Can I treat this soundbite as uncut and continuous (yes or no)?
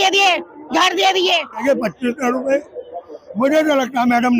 no